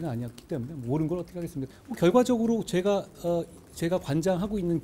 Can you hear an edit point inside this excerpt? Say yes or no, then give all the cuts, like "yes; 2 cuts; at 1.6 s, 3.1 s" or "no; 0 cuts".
yes; 1 cut; at 1.7 s